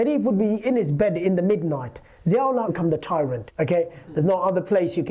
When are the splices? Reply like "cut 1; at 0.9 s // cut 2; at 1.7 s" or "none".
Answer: cut 1; at 2.7 s